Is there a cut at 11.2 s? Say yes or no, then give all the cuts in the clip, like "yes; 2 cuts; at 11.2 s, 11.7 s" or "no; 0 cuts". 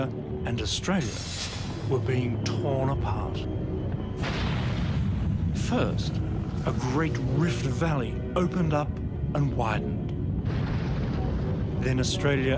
no; 0 cuts